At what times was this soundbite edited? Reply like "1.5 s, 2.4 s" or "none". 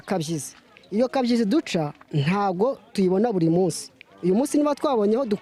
none